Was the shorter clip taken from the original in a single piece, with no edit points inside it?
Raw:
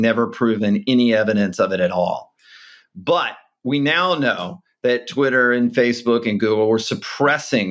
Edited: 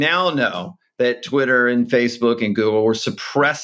yes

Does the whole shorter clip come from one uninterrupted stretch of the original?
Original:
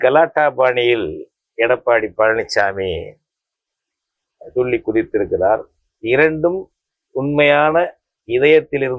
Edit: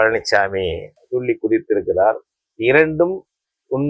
no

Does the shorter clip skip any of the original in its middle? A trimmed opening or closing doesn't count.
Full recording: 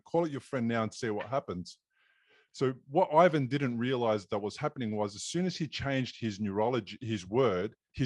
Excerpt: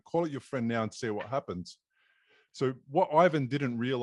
no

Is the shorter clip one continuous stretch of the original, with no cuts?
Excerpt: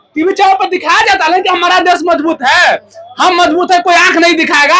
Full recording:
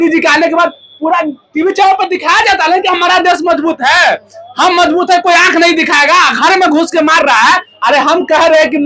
yes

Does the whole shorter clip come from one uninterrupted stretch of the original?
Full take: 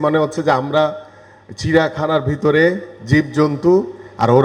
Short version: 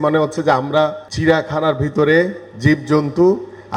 no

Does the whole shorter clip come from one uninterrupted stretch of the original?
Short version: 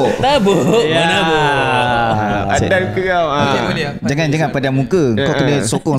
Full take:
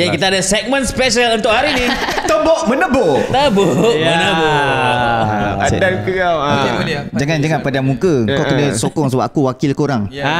yes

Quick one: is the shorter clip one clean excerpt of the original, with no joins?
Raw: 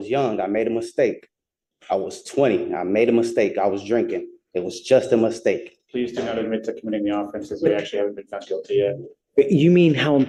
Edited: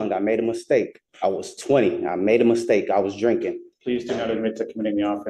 no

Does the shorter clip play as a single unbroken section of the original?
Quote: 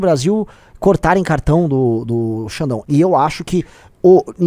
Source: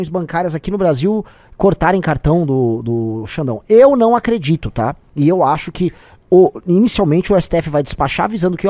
no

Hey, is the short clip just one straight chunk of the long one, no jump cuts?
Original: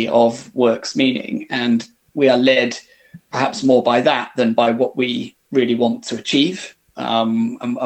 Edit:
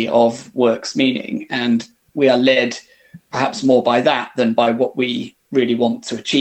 yes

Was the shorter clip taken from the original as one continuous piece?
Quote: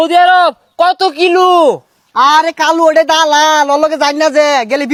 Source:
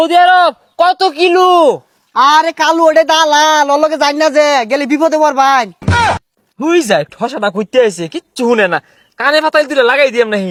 yes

